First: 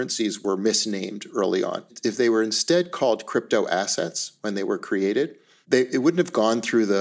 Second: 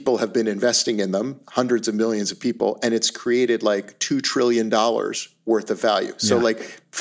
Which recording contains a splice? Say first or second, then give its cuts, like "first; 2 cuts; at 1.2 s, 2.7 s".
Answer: first; 1 cut; at 2.0 s